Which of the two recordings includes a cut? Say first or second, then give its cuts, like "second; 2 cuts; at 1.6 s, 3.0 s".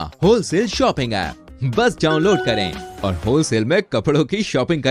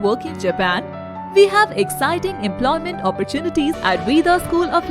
second; 1 cut; at 3.8 s